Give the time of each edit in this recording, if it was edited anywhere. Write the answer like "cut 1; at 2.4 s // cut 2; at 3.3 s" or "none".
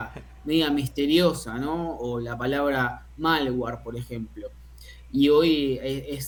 none